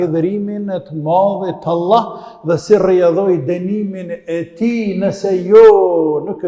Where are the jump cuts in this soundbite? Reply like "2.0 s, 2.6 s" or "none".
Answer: none

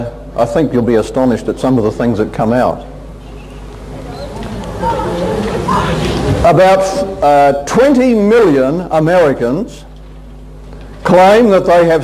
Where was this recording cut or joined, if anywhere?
none

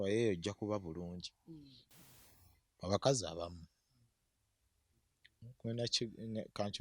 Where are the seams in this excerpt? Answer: 2.0 s

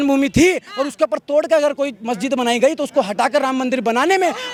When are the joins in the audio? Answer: none

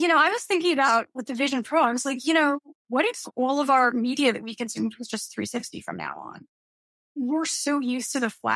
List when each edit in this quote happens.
7.0 s

